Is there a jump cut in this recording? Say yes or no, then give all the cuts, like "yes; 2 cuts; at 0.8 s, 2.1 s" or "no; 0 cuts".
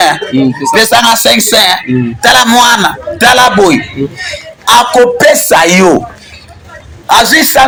no; 0 cuts